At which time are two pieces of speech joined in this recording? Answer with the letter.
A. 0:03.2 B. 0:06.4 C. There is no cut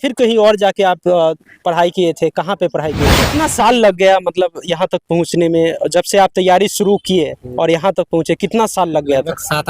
A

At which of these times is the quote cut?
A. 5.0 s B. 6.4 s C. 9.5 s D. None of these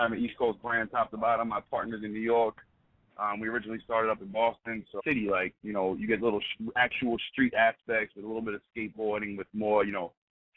D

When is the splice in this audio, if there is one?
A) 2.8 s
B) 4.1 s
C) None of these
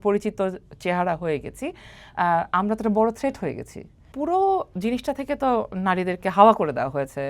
B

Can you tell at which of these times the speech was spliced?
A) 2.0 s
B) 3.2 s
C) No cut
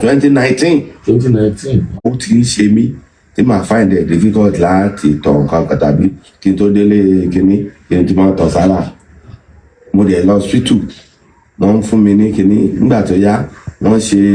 A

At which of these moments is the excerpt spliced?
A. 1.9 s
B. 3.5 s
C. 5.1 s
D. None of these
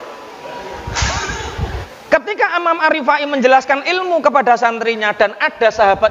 A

